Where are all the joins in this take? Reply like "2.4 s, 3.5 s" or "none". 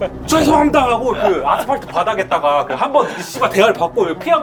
none